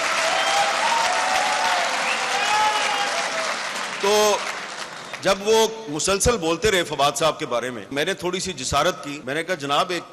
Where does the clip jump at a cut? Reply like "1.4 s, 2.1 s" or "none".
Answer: 7.9 s, 9.1 s